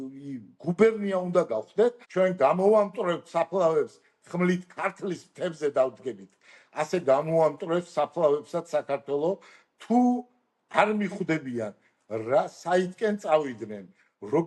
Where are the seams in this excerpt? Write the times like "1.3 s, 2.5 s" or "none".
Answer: 2.0 s